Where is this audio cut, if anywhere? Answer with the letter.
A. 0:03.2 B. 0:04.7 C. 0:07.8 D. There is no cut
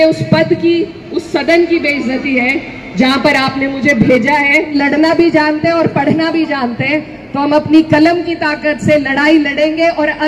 B